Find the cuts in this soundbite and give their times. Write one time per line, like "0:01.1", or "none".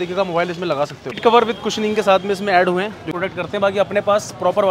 0:01.2
0:03.0

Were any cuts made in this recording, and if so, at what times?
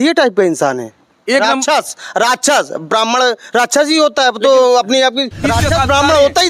0:05.4

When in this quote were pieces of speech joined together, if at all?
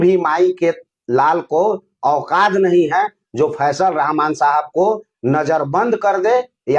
none

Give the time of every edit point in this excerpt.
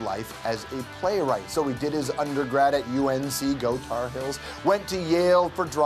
0:02.6

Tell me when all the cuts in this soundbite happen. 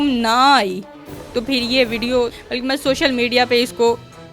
0:02.4

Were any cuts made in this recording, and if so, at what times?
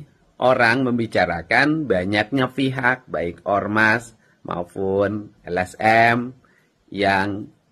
none

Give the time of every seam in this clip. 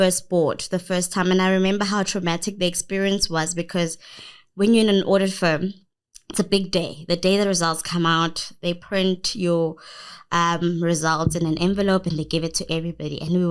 none

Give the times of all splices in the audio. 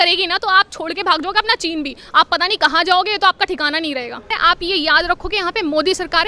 0:04.3

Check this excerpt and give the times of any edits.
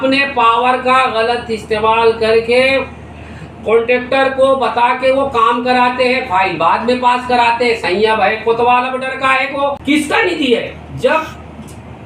0:09.8

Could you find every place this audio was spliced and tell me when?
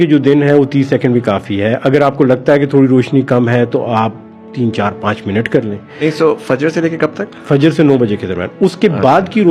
none

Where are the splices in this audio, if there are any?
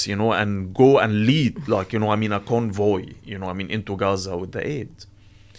none

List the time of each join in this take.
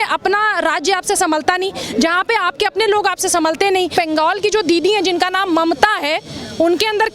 0:03.9

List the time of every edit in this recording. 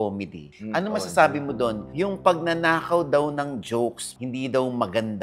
none

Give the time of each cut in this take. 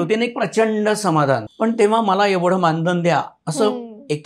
0:01.5

